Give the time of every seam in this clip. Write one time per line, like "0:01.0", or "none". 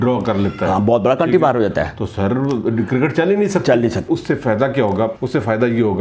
0:04.1
0:05.2